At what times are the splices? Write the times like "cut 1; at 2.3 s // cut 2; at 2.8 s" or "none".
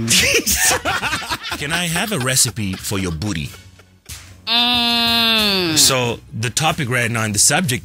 cut 1; at 1.5 s